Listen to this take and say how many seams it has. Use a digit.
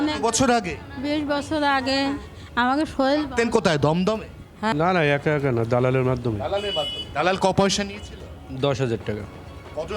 1